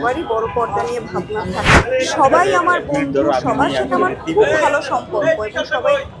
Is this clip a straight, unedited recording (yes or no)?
no